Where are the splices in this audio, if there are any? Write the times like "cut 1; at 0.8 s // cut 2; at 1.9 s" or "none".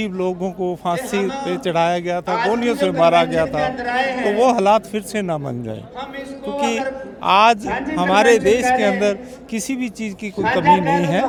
none